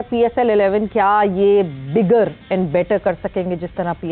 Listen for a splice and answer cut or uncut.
uncut